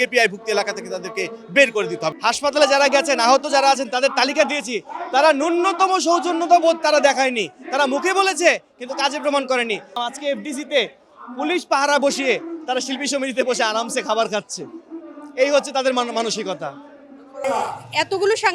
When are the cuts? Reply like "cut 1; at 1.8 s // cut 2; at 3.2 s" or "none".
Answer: cut 1; at 2.1 s // cut 2; at 10.0 s // cut 3; at 17.4 s